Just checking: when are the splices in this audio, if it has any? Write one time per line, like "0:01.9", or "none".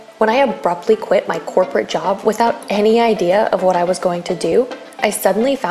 none